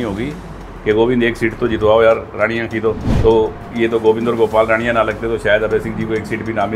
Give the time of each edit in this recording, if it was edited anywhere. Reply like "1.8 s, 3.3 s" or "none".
3.1 s